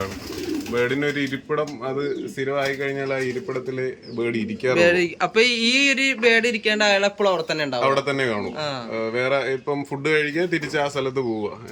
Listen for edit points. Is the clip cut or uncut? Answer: uncut